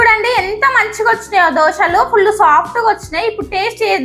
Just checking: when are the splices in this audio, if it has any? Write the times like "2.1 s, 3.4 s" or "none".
none